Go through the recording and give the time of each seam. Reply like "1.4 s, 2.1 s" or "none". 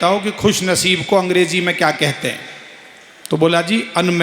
none